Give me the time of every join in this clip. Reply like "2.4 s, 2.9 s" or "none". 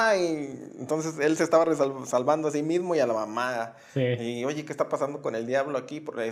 none